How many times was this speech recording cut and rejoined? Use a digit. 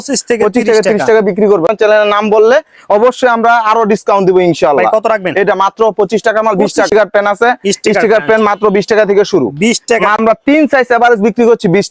3